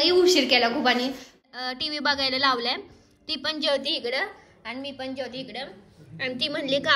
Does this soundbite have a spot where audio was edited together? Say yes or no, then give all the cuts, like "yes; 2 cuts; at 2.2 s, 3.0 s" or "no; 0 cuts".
yes; 1 cut; at 1.4 s